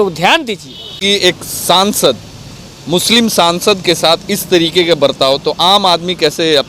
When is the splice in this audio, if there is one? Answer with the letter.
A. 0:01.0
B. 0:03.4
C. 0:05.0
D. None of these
A